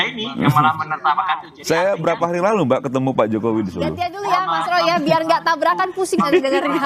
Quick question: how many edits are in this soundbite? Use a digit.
2